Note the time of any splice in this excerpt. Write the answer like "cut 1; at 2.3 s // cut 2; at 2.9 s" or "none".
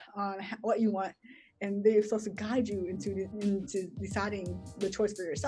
none